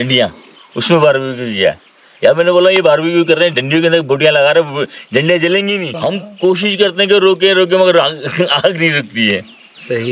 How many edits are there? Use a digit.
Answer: 1